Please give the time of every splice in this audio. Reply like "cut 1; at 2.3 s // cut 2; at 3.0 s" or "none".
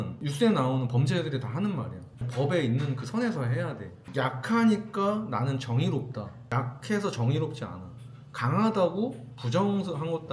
none